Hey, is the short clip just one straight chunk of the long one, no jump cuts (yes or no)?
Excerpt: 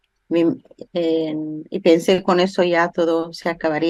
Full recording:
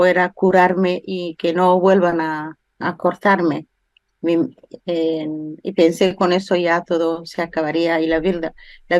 yes